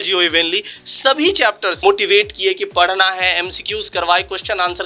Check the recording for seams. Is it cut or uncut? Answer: cut